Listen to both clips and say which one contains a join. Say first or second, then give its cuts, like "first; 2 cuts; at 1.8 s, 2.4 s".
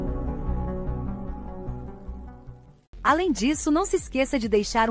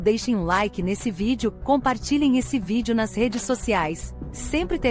first; 1 cut; at 2.8 s